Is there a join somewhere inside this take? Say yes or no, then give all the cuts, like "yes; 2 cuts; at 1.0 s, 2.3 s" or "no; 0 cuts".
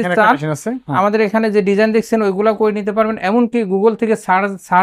no; 0 cuts